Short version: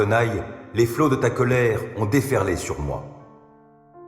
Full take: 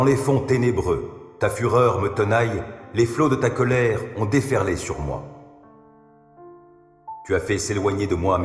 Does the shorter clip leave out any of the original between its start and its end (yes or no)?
yes